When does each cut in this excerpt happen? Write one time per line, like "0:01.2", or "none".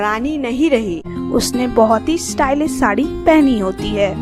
0:01.2